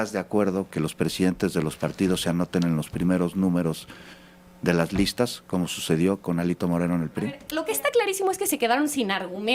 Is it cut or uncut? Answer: cut